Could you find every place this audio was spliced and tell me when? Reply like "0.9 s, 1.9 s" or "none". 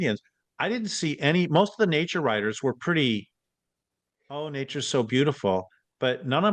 none